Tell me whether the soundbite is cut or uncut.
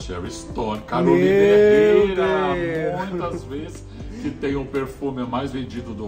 uncut